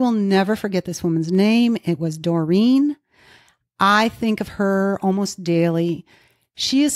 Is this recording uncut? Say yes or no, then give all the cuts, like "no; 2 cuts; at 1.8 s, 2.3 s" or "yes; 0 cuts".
yes; 0 cuts